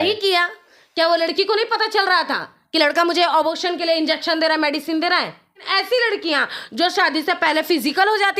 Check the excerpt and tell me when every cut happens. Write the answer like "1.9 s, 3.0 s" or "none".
5.7 s